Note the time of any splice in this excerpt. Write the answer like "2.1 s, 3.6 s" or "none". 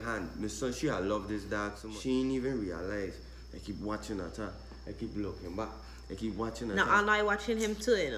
1.8 s

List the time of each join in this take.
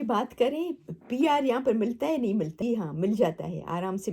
2.6 s

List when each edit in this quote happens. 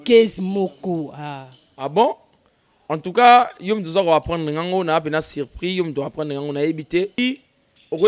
7.2 s

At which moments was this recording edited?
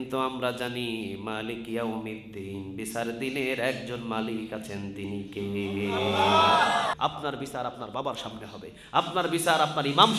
6.9 s

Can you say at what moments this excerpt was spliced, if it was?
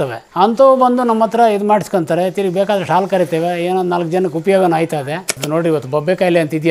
5.4 s

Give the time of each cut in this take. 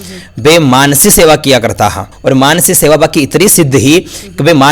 2.1 s

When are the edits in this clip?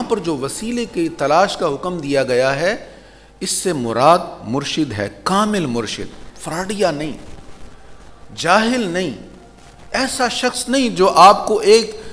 none

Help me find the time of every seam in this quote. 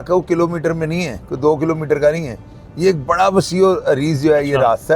none

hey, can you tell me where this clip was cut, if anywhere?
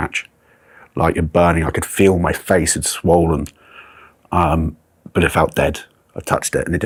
none

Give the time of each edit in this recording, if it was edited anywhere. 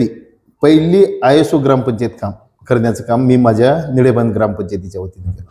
none

